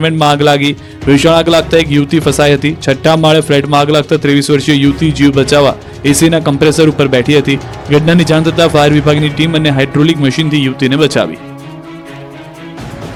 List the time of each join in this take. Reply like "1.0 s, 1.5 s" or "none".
none